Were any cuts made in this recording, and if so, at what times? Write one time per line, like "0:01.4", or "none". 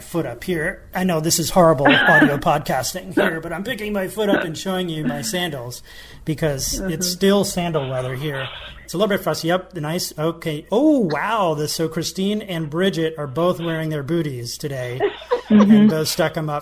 none